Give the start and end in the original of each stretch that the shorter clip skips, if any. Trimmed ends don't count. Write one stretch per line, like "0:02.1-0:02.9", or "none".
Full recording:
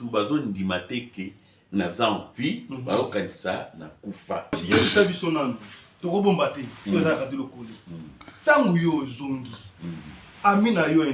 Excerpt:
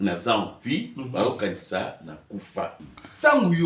0:04.4-0:07.9